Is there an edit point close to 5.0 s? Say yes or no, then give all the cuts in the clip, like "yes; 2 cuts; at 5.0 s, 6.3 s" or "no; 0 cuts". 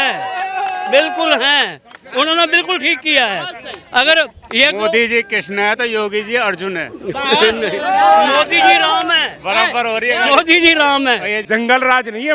no; 1 cut; at 11.4 s